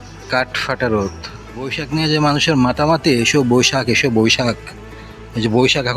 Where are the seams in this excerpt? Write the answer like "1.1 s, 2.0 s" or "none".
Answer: 1.8 s